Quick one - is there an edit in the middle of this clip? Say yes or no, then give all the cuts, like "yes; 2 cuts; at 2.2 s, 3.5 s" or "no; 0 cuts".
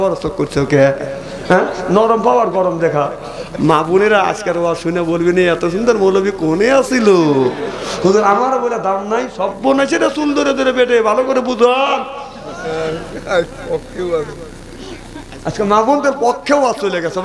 no; 0 cuts